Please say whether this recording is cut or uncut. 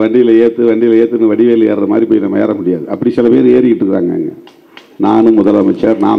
uncut